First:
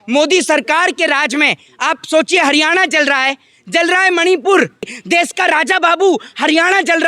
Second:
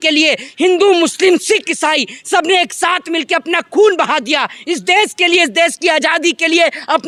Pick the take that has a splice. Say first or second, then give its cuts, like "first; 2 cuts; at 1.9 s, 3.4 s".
first; 1 cut; at 4.9 s